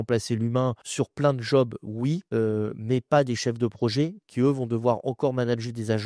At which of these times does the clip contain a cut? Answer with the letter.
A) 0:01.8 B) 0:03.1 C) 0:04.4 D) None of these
D